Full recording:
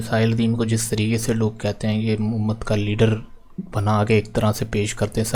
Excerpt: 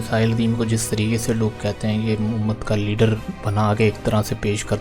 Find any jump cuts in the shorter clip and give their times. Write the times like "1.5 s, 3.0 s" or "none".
3.3 s